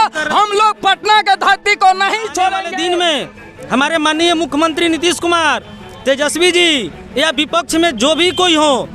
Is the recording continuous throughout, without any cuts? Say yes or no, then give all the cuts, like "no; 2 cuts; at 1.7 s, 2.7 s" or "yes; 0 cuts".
no; 1 cut; at 2.7 s